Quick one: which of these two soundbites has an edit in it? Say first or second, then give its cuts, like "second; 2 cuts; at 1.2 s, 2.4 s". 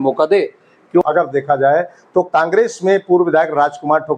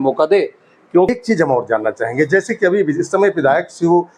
first; 1 cut; at 1.0 s